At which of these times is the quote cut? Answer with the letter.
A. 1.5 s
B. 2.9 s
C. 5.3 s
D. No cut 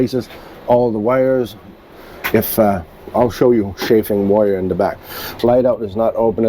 C